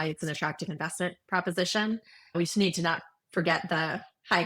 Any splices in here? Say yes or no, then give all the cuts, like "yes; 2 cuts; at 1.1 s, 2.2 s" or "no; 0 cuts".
no; 0 cuts